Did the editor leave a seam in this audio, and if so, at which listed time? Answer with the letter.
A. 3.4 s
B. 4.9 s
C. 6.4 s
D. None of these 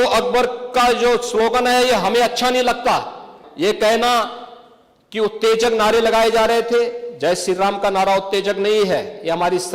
A